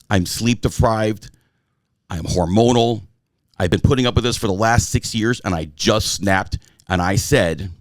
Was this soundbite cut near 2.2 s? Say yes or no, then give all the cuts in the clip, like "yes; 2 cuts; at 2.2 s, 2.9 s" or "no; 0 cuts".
no; 1 cut; at 3.7 s